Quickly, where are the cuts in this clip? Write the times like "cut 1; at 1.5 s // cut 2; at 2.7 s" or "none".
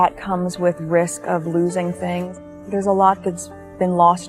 cut 1; at 2.3 s